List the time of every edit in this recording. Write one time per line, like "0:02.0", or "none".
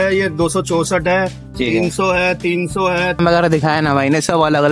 0:03.2